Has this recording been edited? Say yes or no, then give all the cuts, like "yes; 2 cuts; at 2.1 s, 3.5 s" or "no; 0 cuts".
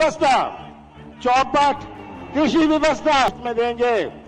yes; 1 cut; at 3.3 s